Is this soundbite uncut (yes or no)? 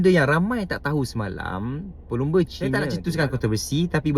no